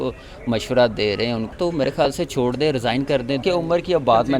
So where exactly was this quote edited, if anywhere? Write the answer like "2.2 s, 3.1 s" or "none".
1.5 s, 3.4 s